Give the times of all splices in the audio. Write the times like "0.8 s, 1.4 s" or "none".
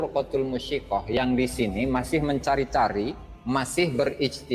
3.3 s